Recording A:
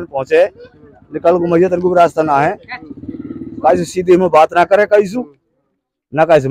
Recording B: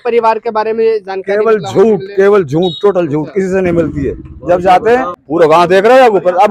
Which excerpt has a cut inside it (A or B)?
B